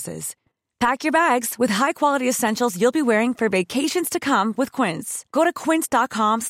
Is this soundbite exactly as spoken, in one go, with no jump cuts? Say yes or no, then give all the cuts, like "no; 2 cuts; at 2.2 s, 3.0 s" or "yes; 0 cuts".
yes; 0 cuts